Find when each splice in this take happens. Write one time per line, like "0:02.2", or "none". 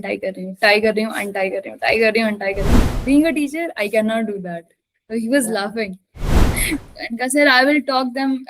0:02.8
0:06.5